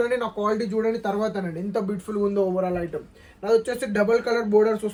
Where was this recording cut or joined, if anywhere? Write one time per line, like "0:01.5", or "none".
none